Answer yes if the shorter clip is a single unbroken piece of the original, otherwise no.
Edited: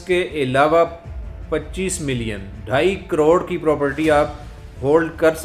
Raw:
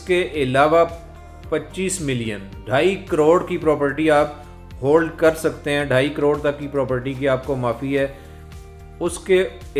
yes